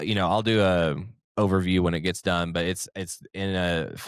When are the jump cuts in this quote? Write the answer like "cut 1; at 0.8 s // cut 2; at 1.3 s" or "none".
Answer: none